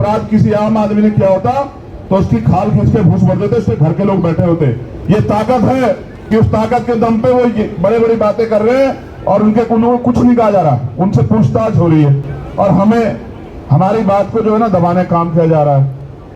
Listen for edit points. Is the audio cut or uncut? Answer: uncut